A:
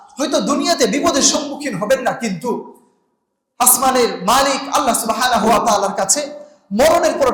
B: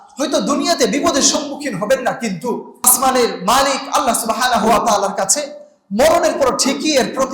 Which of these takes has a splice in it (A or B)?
B